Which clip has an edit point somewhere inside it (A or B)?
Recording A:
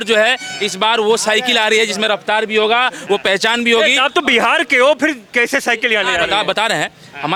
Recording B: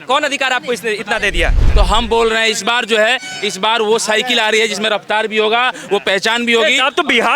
B